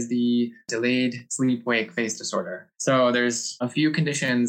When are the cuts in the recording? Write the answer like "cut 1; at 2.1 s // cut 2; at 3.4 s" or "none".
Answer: cut 1; at 0.8 s // cut 2; at 2.6 s // cut 3; at 3.5 s

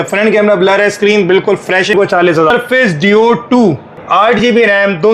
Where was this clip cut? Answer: cut 1; at 2.3 s // cut 2; at 3.9 s

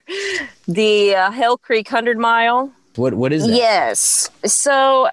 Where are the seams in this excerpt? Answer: cut 1; at 2.9 s

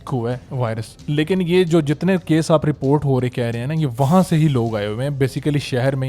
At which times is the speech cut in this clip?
cut 1; at 0.9 s

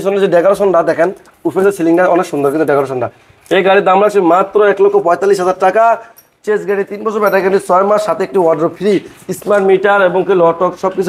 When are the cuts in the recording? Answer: none

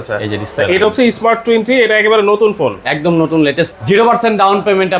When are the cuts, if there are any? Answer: cut 1; at 3.8 s

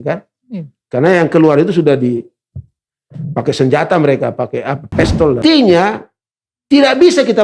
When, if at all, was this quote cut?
cut 1; at 5.4 s

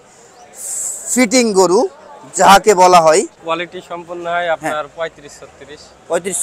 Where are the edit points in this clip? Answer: cut 1; at 3.4 s

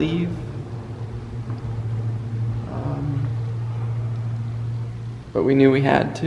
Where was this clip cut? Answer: none

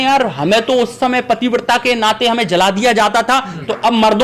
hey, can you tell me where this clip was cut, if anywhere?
none

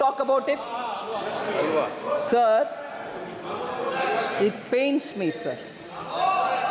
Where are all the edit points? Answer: none

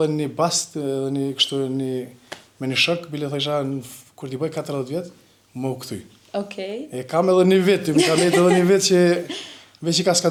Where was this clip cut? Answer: none

